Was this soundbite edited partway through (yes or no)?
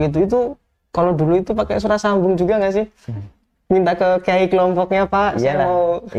no